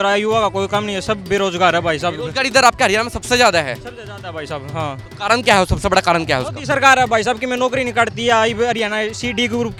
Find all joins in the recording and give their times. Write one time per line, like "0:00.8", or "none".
none

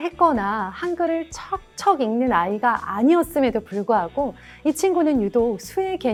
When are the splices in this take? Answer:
none

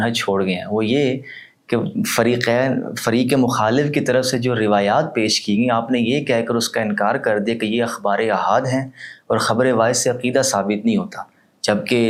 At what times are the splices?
none

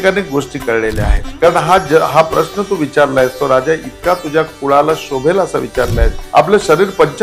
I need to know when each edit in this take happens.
0:01.2
0:06.2

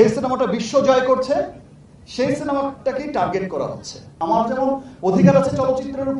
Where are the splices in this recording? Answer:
0:04.2

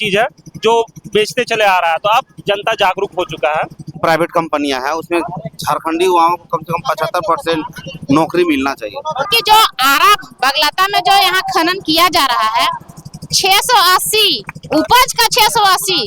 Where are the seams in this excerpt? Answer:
0:04.0
0:09.3

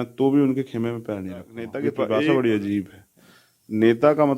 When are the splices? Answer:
0:02.0

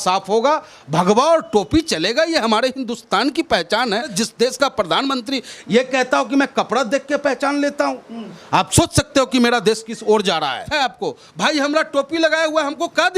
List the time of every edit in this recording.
0:04.1
0:10.7

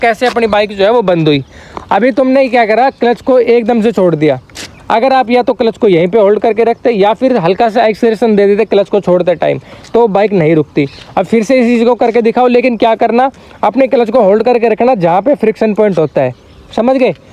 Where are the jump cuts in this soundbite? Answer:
none

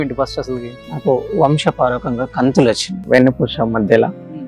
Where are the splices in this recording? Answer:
0:02.9

